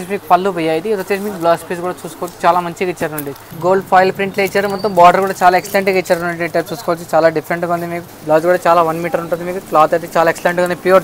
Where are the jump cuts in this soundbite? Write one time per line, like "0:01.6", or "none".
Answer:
0:03.5
0:08.0